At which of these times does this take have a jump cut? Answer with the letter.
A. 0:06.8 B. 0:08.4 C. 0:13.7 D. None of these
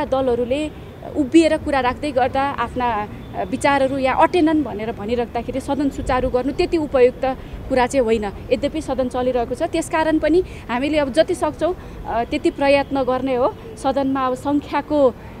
D